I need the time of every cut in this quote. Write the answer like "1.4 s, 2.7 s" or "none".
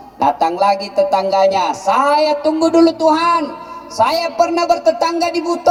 none